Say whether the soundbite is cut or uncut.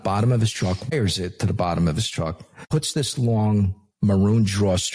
cut